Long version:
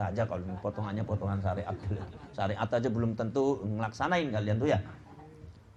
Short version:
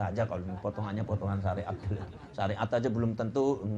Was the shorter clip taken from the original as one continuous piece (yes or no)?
yes